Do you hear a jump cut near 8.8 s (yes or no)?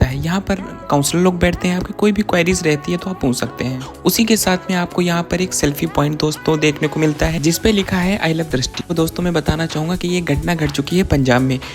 yes